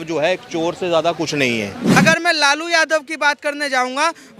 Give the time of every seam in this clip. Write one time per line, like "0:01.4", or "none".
0:02.0